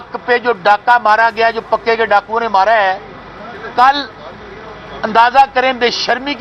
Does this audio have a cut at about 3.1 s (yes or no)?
no